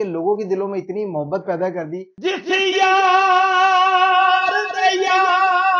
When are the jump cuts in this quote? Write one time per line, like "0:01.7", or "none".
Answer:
0:02.1